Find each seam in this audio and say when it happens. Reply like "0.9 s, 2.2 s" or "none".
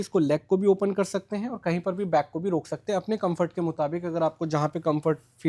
none